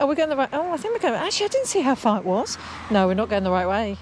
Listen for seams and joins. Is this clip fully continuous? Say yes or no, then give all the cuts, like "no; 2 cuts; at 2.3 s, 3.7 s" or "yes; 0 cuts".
yes; 0 cuts